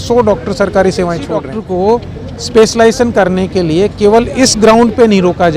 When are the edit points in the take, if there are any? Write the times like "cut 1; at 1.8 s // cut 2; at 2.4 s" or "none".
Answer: cut 1; at 1.5 s